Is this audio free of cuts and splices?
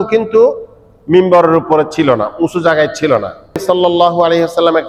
no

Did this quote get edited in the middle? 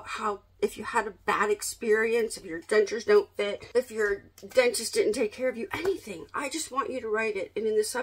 yes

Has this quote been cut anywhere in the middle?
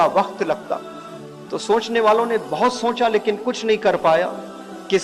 no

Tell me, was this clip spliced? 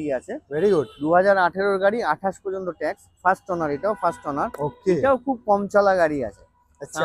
no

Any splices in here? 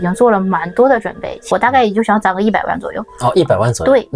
yes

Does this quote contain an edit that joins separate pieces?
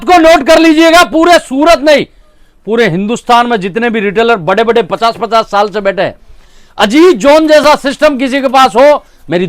no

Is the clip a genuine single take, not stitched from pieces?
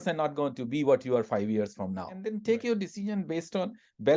no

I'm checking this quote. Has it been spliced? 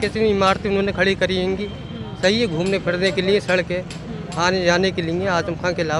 no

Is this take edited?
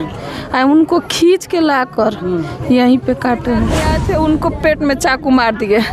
yes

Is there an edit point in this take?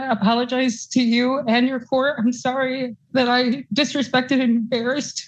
no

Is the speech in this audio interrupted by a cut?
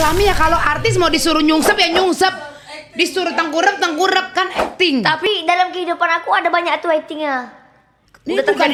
no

